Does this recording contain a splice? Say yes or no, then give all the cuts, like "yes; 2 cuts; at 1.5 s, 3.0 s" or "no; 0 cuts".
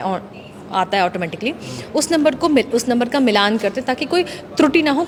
no; 0 cuts